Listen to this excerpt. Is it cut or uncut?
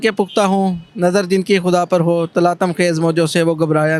uncut